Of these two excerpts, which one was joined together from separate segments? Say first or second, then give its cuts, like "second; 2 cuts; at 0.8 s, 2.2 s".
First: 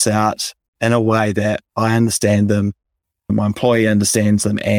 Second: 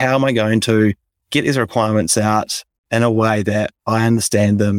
second; 1 cut; at 1.1 s